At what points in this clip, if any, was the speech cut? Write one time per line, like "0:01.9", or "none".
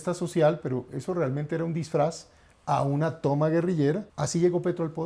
0:04.1